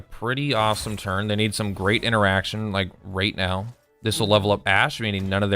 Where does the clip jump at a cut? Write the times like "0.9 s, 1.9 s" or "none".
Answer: 3.8 s